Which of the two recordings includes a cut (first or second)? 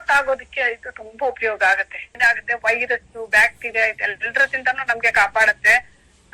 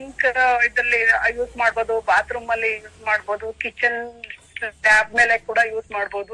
first